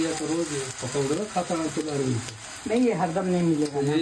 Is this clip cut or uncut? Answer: uncut